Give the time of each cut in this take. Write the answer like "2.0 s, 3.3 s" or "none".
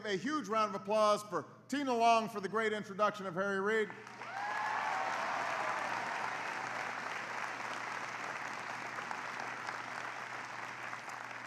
10.3 s